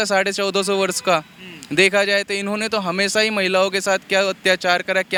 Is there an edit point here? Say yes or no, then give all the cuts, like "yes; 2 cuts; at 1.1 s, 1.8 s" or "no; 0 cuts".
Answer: no; 0 cuts